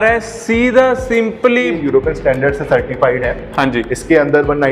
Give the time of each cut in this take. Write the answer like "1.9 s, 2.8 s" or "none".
1.8 s